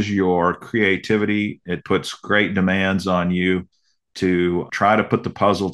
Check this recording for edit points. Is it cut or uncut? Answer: cut